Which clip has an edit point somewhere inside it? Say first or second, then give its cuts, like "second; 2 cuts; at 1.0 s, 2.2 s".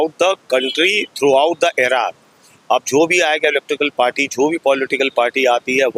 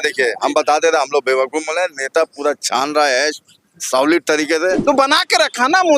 second; 1 cut; at 4.8 s